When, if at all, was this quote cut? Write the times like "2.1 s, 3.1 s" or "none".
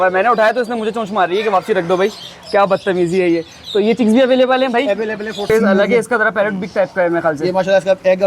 5.5 s

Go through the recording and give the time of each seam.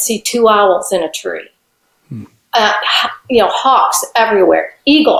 none

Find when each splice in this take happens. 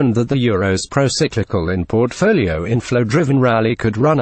3.0 s

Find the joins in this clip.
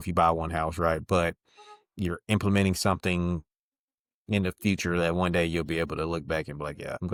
none

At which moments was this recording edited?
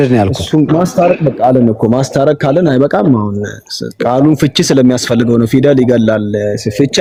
none

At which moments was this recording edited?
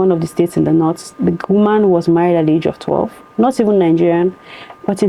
none

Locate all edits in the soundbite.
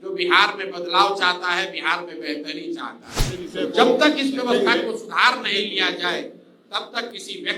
3.4 s

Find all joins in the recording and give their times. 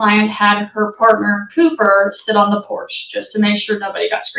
none

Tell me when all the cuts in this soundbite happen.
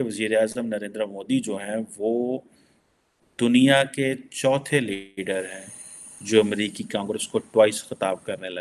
none

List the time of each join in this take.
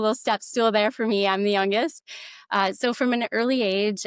none

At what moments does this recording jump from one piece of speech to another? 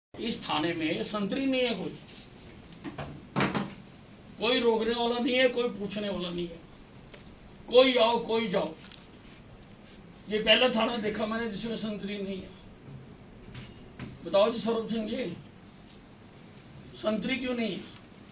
none

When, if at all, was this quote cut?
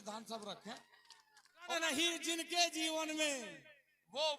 1.7 s

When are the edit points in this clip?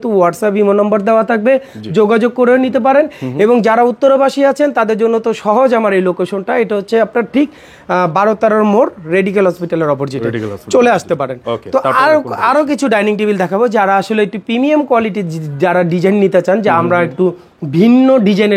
none

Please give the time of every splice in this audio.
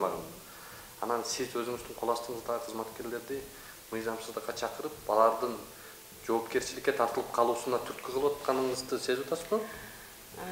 none

